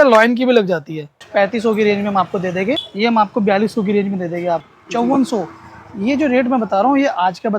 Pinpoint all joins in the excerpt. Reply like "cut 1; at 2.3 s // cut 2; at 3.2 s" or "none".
cut 1; at 1.2 s // cut 2; at 2.9 s // cut 3; at 4.7 s